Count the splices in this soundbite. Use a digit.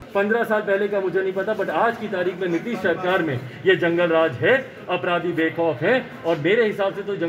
0